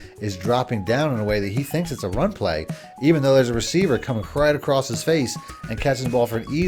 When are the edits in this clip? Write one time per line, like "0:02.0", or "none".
none